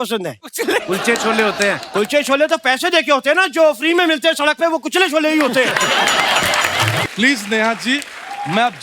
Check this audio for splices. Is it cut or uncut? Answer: cut